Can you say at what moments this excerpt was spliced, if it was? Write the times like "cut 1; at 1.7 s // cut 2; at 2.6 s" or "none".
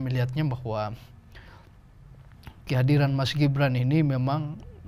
none